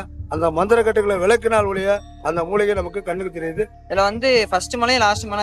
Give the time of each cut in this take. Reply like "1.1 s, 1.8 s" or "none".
3.8 s